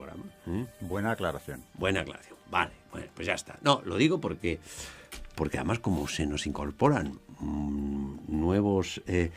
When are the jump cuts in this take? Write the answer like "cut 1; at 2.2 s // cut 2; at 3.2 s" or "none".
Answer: cut 1; at 8.2 s